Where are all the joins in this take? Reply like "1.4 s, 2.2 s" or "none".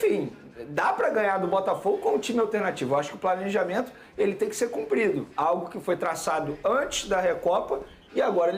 none